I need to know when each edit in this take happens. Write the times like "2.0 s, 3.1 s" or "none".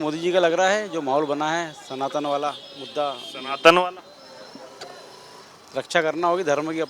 none